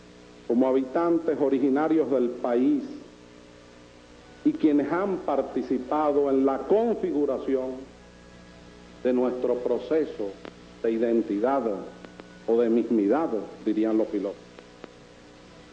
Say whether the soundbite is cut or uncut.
cut